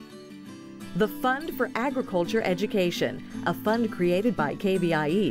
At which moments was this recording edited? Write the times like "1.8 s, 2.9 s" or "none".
0.9 s